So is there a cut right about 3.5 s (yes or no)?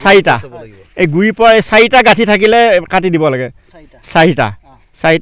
no